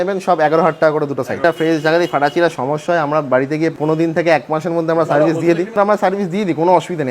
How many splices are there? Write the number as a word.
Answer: three